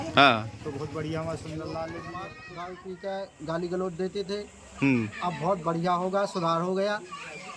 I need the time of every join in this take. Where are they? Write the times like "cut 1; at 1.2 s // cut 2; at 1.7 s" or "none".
cut 1; at 2.4 s